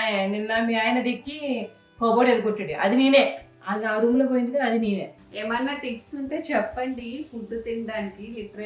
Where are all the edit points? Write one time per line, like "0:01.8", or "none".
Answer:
0:05.2

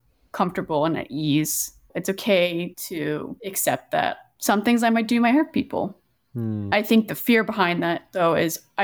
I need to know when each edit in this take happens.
0:01.9
0:02.8

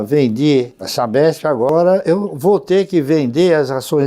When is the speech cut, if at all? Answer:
0:01.7

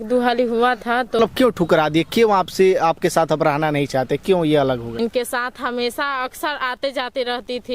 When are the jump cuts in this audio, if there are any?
0:01.2
0:04.9

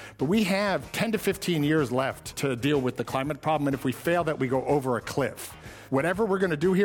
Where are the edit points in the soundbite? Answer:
0:00.9
0:02.3
0:05.7

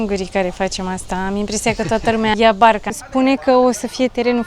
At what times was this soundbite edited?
0:02.3
0:02.9

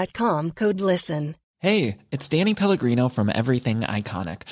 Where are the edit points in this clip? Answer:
0:01.4

